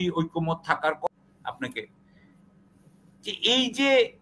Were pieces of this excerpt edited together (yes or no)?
yes